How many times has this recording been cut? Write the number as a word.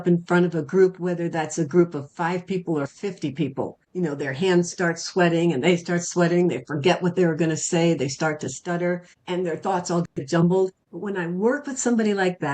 three